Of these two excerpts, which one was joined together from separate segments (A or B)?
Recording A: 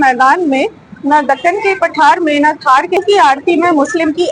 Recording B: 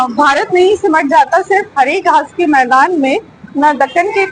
A